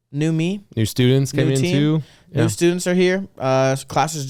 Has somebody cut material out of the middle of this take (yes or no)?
no